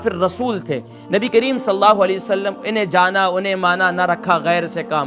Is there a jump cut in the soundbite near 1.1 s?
no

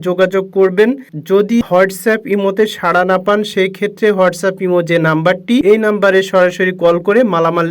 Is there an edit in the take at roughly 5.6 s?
yes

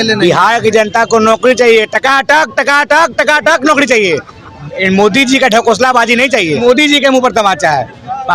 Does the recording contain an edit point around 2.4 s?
no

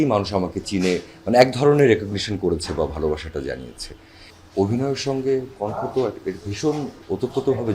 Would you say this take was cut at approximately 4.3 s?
yes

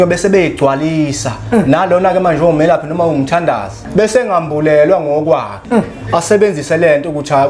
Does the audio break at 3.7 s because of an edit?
yes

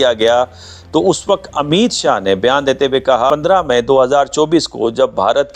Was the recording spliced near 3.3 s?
yes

